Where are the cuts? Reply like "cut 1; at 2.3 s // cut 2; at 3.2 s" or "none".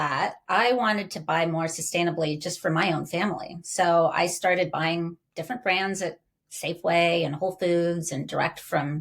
none